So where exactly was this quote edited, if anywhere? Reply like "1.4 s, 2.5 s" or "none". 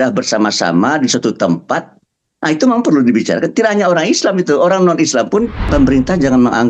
5.7 s